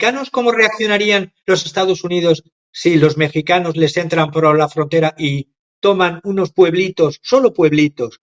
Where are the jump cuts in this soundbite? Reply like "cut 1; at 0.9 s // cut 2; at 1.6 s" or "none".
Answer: none